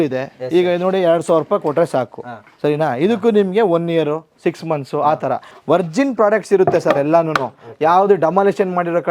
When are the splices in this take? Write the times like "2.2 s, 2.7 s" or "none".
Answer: 5.5 s